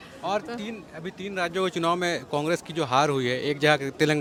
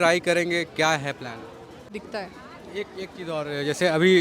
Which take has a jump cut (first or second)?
second